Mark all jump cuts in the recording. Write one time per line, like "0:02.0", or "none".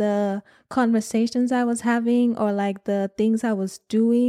none